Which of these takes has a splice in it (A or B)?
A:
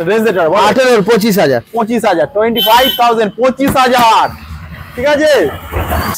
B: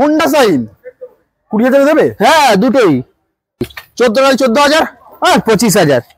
B